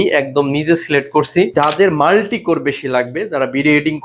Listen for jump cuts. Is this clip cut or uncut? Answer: cut